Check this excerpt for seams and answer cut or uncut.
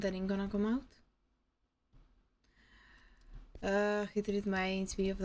uncut